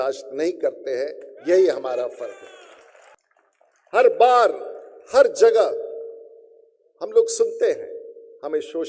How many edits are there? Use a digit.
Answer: 1